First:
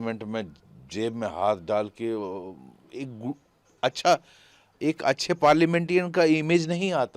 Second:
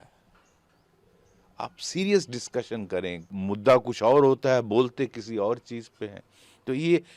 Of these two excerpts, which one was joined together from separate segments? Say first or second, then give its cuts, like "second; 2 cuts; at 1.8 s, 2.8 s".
second; 1 cut; at 3.2 s